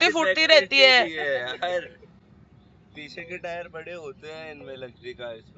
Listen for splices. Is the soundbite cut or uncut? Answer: uncut